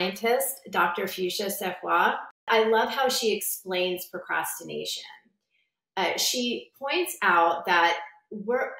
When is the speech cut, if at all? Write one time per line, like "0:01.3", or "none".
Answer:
0:02.5